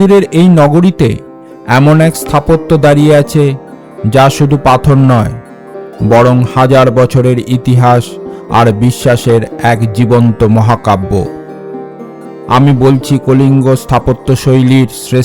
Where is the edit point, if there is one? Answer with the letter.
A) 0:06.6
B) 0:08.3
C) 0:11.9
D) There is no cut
C